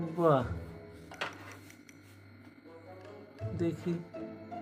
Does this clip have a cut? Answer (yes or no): no